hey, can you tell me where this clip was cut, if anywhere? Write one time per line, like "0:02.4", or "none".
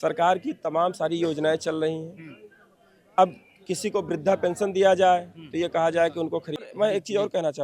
0:06.6